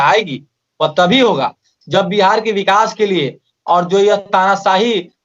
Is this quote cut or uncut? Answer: uncut